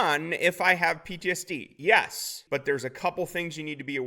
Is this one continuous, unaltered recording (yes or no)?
no